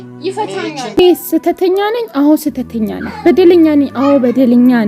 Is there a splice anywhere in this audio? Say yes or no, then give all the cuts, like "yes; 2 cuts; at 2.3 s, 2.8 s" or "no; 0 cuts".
yes; 1 cut; at 1.0 s